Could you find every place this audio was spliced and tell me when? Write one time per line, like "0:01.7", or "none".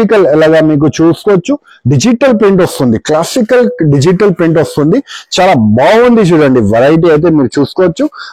none